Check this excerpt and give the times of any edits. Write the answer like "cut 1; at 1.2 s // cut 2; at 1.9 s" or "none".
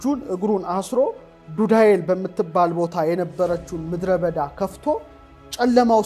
none